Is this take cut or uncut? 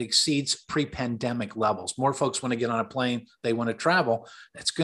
uncut